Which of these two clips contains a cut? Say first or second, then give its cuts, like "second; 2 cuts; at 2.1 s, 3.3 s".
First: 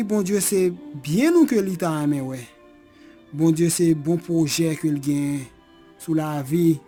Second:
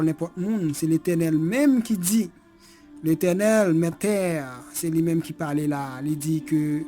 second; 1 cut; at 4.0 s